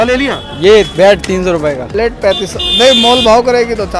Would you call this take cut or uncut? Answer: cut